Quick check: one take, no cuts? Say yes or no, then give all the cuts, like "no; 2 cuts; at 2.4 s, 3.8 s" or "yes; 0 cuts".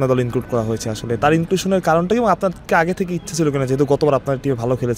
yes; 0 cuts